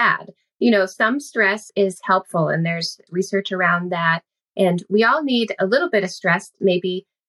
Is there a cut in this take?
yes; 2 cuts; at 1.6 s, 3.0 s

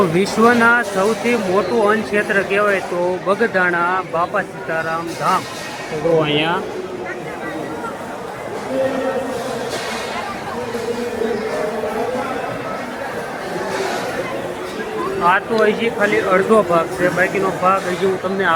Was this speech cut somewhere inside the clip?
no; 0 cuts

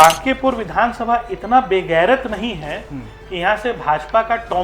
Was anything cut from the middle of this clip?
no; 0 cuts

